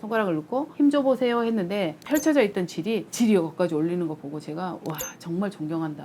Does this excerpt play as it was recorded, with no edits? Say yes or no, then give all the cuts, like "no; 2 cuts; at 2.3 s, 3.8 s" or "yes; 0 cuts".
yes; 0 cuts